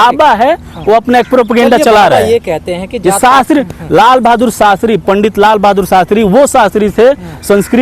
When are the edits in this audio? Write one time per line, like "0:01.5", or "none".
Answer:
none